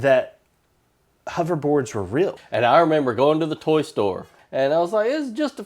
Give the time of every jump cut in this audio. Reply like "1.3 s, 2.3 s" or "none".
2.4 s, 4.4 s